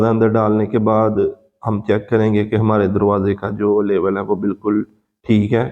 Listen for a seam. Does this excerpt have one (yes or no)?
no